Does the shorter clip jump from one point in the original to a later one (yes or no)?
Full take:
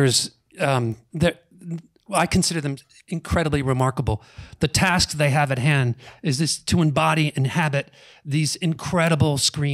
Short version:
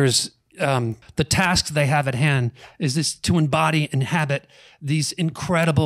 yes